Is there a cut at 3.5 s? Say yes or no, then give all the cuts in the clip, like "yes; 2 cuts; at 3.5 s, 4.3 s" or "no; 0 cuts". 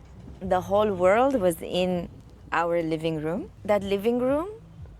yes; 1 cut; at 3.5 s